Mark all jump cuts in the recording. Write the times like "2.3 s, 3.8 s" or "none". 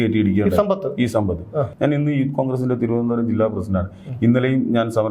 1.7 s